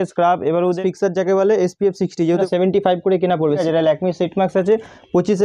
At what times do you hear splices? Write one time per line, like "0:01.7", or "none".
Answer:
0:00.8
0:02.4
0:03.6